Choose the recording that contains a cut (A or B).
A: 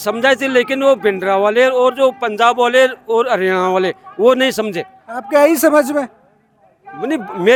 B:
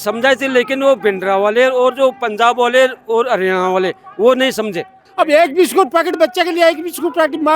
B